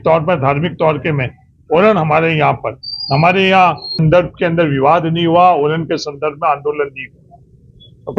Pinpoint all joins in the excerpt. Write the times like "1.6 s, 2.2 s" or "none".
3.9 s